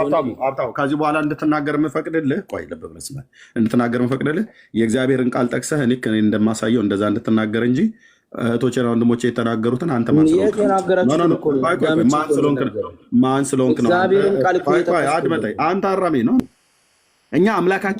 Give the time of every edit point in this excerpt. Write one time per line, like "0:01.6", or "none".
0:16.5